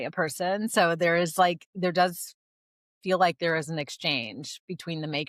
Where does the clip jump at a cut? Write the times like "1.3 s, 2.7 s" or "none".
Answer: none

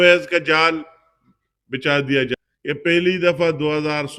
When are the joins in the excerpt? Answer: 2.4 s

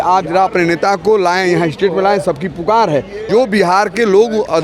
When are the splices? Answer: 3.3 s

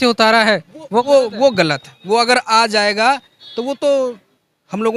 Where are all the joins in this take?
none

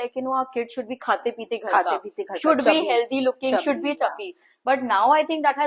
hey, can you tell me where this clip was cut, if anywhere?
none

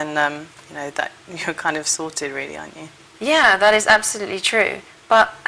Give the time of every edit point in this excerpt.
3.1 s

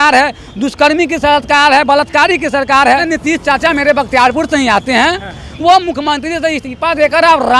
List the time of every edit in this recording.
3.0 s

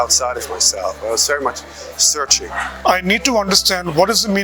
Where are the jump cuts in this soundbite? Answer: 2.7 s

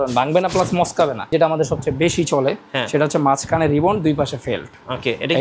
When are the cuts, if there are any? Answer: 1.3 s

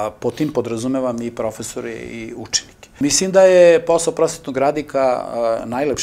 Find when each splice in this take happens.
3.0 s

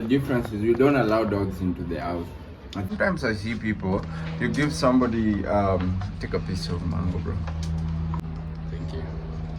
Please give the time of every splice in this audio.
2.9 s, 8.2 s

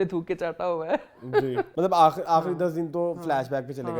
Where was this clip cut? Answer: 1.7 s

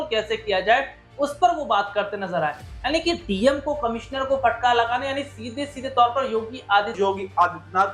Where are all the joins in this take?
6.9 s

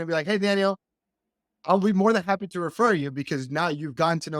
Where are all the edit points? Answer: none

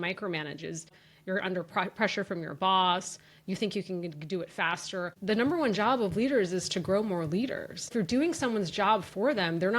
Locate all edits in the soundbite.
1.0 s, 5.2 s, 7.9 s

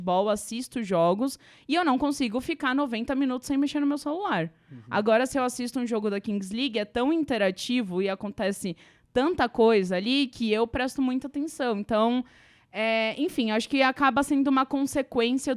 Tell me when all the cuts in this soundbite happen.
none

